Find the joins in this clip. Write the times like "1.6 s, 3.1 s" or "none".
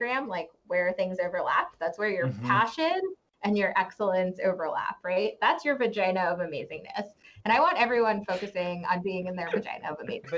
none